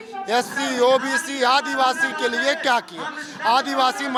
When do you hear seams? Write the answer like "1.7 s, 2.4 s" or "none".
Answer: none